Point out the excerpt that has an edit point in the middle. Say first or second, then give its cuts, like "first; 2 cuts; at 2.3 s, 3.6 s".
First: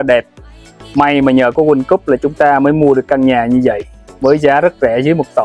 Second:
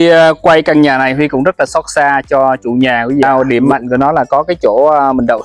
second; 1 cut; at 3.2 s